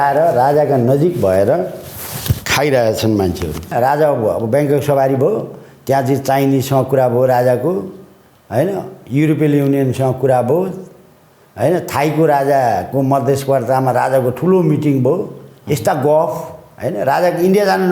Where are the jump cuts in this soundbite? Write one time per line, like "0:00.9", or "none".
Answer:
0:03.7